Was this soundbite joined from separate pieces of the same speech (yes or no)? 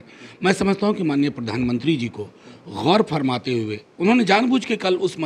no